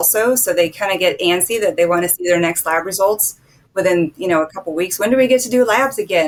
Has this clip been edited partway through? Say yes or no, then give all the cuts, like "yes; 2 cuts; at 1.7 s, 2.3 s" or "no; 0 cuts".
no; 0 cuts